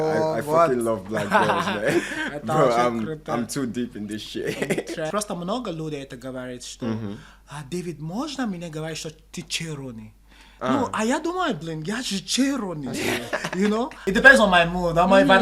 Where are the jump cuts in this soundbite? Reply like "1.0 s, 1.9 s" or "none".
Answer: 5.1 s, 14.0 s